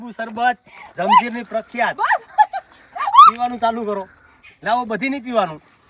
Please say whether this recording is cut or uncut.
uncut